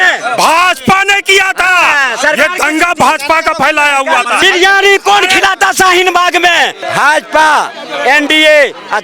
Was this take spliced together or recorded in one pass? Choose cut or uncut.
cut